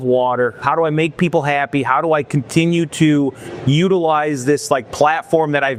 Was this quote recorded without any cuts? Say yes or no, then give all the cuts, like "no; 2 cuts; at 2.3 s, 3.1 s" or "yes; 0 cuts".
yes; 0 cuts